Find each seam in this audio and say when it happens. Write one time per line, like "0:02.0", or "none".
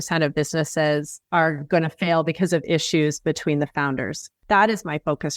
0:01.2
0:04.3